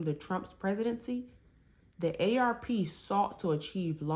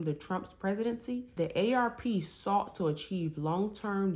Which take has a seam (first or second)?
second